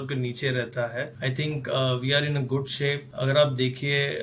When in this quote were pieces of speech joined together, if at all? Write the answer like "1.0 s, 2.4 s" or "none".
1.1 s, 3.1 s